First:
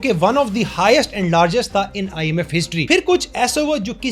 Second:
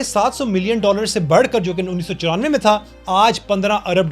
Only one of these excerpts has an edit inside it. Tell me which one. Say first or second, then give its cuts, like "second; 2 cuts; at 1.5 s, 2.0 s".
first; 1 cut; at 2.8 s